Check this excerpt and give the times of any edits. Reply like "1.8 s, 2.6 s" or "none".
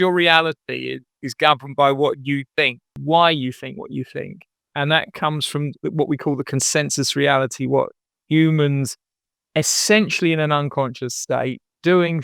2.9 s